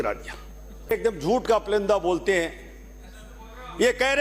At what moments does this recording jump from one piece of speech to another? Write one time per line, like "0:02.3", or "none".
0:00.9